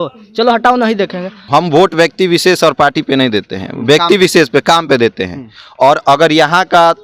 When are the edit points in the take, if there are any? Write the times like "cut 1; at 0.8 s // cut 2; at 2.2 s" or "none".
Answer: cut 1; at 1.4 s